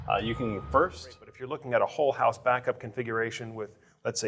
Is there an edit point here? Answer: yes; 1 cut; at 1.3 s

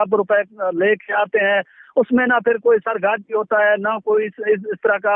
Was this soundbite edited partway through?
no; 0 cuts

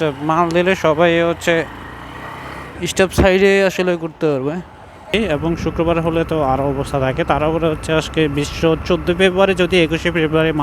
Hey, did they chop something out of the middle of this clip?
yes; 1 cut; at 5.1 s

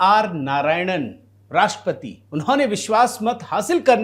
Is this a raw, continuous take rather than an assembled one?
yes; 0 cuts

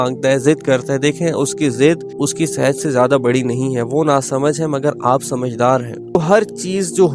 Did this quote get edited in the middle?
yes; 2 cuts; at 2.1 s, 6.1 s

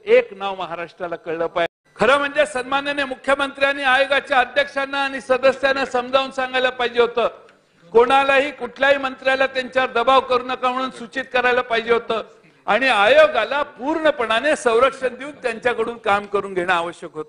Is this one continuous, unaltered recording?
no; 1 cut; at 1.8 s

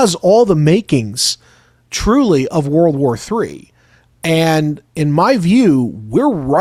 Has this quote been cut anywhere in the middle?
no; 0 cuts

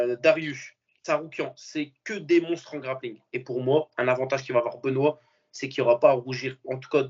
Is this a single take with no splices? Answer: yes; 0 cuts

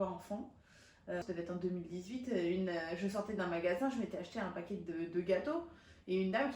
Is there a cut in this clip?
yes; 1 cut; at 1.2 s

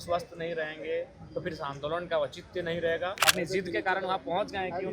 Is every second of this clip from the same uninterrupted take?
no; 1 cut; at 3.2 s

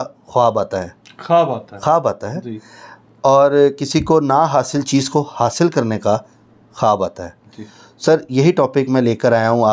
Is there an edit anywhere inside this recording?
no; 0 cuts

